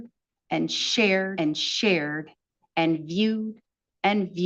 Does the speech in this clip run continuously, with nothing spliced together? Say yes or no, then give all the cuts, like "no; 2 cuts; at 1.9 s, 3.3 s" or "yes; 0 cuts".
no; 1 cut; at 1.3 s